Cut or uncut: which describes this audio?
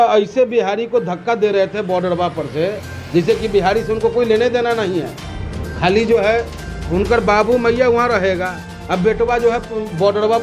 uncut